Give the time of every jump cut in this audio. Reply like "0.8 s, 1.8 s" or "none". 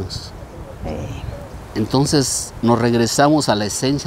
none